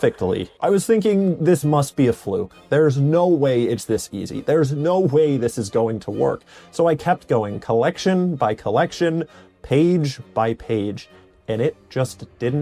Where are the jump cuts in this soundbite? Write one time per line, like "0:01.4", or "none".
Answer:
none